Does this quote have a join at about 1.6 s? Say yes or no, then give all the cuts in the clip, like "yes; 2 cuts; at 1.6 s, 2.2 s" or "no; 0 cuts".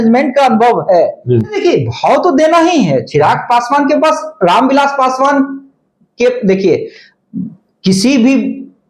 yes; 1 cut; at 1.6 s